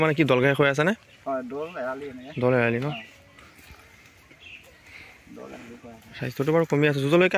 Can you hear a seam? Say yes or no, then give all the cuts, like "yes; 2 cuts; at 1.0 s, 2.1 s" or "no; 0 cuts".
no; 0 cuts